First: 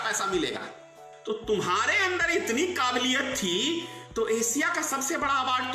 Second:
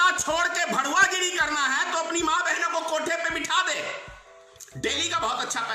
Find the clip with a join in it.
first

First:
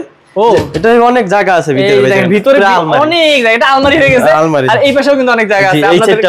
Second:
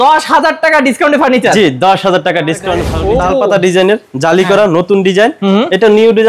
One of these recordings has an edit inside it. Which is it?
second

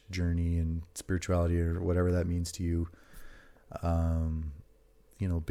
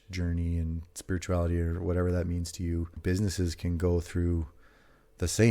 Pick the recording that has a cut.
second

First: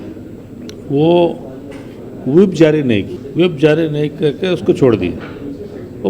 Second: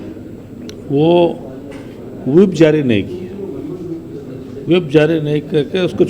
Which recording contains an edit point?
first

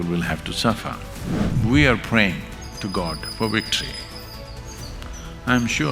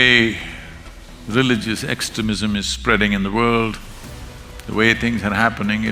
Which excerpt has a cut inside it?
first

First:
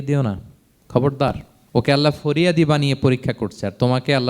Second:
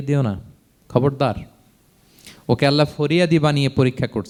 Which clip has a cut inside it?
first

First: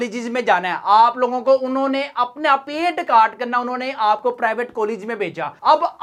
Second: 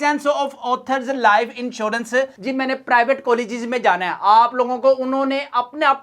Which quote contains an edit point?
second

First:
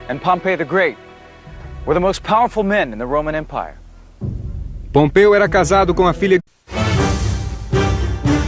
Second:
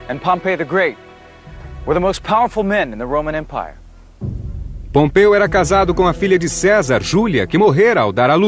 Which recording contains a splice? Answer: second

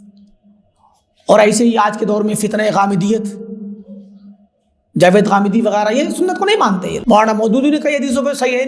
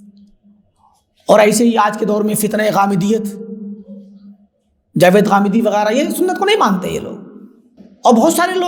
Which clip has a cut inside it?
first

